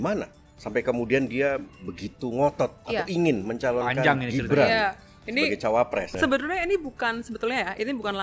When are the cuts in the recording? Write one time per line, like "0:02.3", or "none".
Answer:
0:02.8
0:06.1